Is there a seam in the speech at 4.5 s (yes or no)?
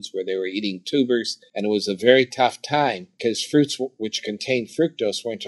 no